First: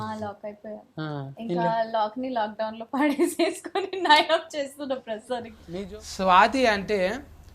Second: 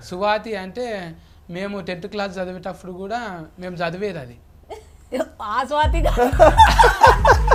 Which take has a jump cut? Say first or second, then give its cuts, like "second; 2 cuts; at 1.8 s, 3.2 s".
first; 1 cut; at 5.6 s